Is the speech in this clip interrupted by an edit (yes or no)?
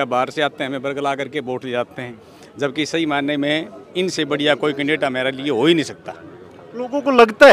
no